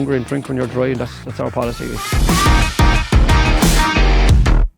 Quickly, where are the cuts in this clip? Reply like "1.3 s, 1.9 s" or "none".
2.0 s